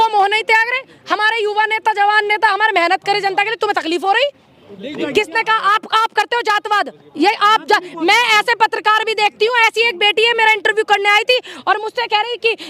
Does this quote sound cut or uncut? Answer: cut